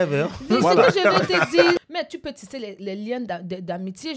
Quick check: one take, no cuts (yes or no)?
no